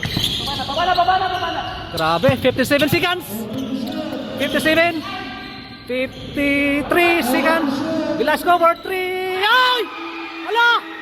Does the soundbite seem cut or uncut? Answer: uncut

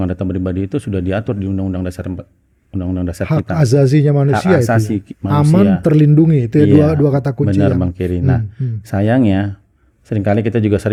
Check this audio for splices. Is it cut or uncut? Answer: uncut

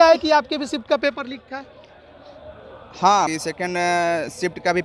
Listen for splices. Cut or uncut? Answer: cut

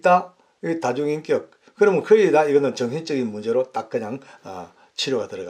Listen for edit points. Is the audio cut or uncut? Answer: uncut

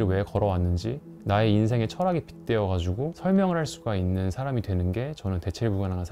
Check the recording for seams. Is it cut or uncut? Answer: uncut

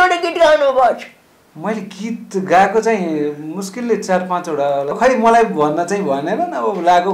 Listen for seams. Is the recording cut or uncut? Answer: cut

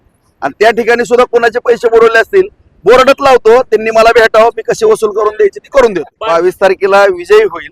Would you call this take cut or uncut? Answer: cut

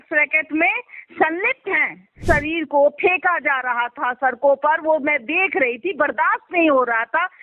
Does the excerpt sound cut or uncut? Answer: cut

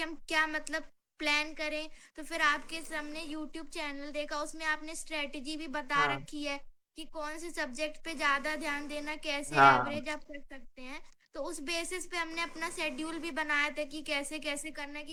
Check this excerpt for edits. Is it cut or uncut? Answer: uncut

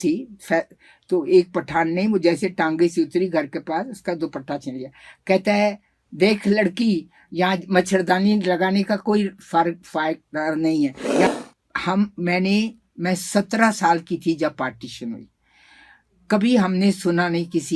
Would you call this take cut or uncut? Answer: cut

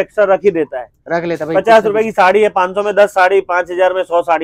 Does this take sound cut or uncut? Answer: uncut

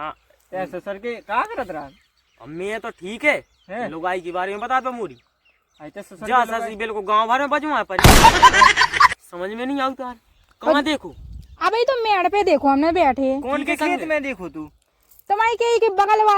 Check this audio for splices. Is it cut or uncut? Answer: cut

